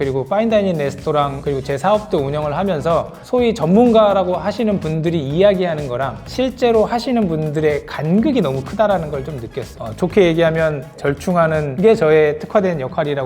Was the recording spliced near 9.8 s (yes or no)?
yes